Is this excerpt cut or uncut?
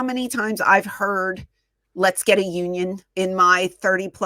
cut